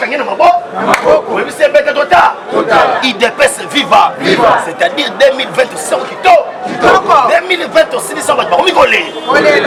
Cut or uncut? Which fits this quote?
uncut